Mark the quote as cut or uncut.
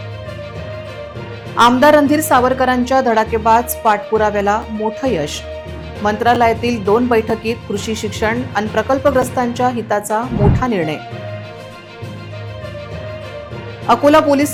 uncut